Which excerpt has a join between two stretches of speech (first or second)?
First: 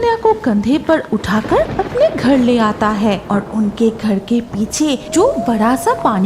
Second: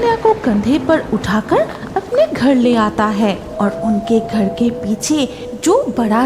first